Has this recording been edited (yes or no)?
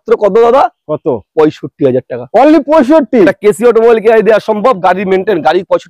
no